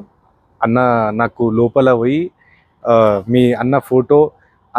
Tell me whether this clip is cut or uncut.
uncut